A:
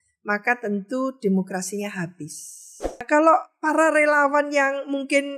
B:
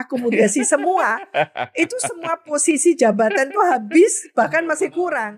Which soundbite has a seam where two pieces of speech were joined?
A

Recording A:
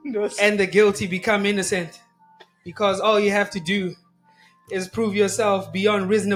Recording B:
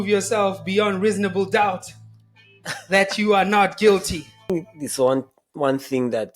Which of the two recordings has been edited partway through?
B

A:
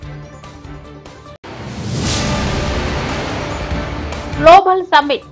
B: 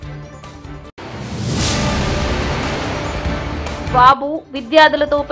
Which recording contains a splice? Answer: B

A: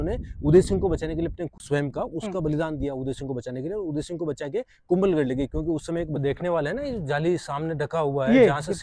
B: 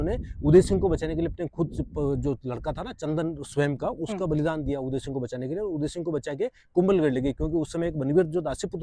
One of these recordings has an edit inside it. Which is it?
A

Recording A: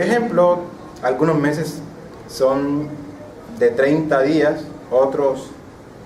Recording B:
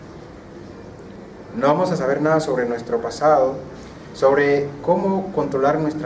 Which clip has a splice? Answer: A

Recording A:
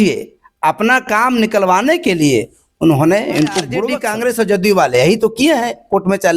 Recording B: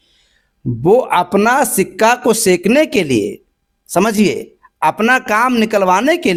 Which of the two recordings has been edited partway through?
A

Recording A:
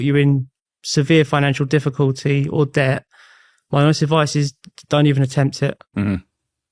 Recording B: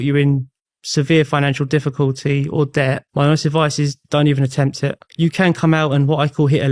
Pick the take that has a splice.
B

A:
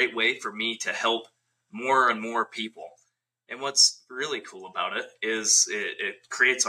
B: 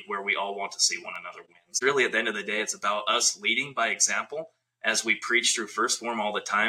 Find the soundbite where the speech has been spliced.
B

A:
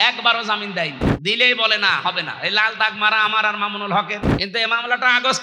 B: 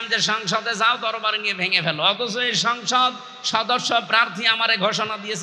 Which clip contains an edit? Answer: A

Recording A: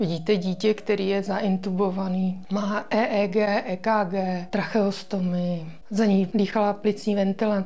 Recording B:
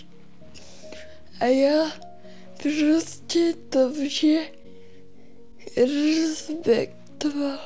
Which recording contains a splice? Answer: A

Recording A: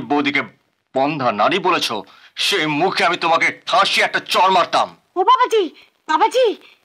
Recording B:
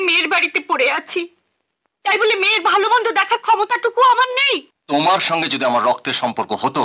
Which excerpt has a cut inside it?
B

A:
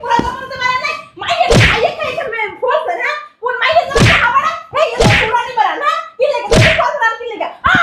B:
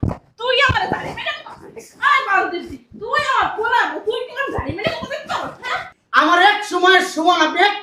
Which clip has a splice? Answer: B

